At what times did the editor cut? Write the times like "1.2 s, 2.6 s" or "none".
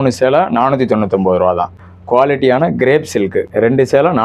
1.8 s, 3.5 s